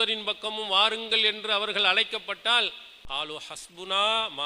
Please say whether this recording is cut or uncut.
cut